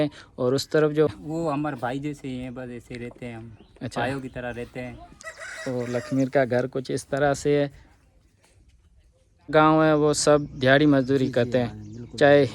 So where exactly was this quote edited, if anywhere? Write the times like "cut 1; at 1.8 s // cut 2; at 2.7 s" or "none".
cut 1; at 1.1 s // cut 2; at 5.1 s // cut 3; at 9.5 s